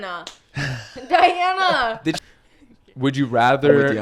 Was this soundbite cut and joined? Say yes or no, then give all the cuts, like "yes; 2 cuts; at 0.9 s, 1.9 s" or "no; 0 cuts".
yes; 1 cut; at 2.2 s